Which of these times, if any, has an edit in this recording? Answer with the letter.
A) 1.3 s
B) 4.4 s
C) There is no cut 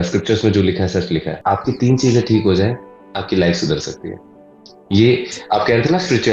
A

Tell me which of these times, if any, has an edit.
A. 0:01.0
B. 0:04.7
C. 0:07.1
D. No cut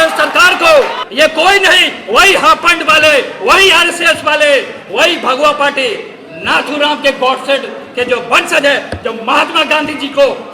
A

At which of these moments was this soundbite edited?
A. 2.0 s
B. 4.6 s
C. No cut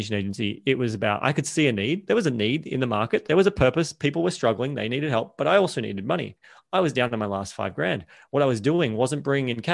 A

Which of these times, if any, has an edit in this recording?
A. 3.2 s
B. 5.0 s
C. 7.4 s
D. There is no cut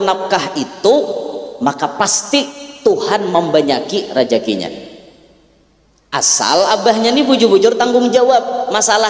D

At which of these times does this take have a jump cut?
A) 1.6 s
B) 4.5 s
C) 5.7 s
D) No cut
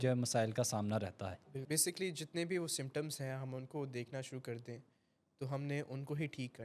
A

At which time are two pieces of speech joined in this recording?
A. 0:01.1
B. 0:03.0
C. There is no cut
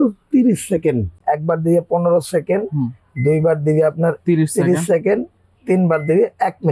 A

